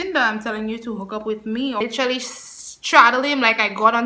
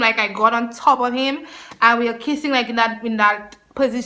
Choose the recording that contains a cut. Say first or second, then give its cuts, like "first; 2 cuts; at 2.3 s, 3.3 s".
first; 1 cut; at 1.8 s